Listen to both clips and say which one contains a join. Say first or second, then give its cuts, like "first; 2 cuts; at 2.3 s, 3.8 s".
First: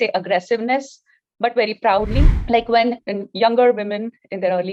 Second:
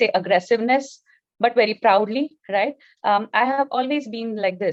first; 1 cut; at 2.4 s